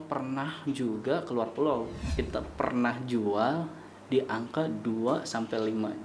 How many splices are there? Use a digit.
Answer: 1